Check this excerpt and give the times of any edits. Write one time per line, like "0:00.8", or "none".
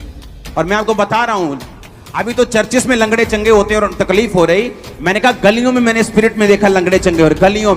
none